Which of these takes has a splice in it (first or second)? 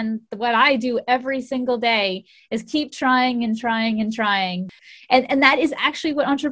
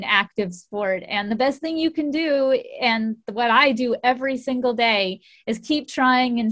first